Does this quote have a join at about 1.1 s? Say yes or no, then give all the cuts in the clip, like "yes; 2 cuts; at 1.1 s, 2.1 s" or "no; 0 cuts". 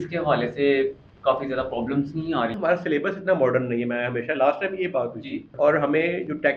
no; 2 cuts; at 2.5 s, 5.5 s